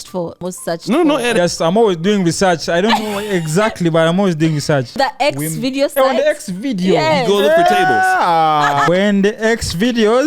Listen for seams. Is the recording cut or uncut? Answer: cut